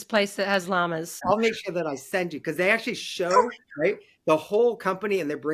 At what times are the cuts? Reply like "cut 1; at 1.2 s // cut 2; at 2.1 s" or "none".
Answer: cut 1; at 1.2 s